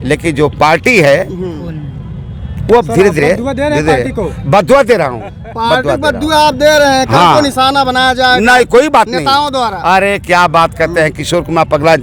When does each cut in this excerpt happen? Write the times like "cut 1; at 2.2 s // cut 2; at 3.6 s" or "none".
none